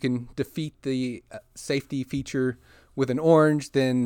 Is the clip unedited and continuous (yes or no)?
yes